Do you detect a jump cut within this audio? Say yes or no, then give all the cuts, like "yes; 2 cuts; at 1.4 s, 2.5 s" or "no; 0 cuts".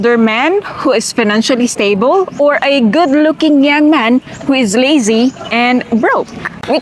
no; 0 cuts